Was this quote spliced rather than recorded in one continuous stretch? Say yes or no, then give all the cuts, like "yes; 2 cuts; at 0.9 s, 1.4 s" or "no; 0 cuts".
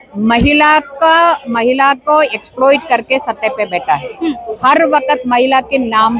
no; 0 cuts